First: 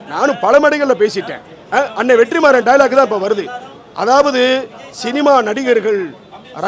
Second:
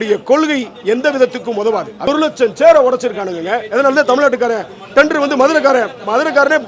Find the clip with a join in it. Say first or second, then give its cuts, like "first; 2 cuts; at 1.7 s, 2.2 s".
second; 1 cut; at 2.1 s